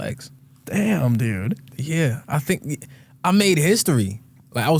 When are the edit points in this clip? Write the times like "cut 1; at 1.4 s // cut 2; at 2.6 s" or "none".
cut 1; at 1.8 s